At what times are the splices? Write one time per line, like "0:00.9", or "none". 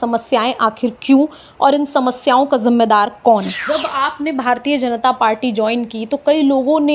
0:03.6